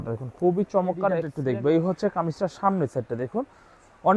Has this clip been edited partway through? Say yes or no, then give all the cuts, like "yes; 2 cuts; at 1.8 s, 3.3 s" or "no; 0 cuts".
yes; 1 cut; at 1.3 s